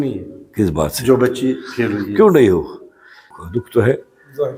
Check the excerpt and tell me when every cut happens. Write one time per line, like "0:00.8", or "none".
0:03.3